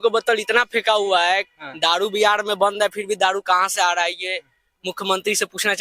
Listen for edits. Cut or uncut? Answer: uncut